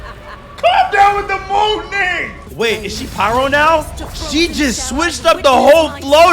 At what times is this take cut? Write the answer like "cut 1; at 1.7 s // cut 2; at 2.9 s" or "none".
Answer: cut 1; at 2.4 s